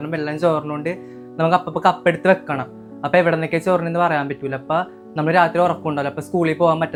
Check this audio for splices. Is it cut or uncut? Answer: uncut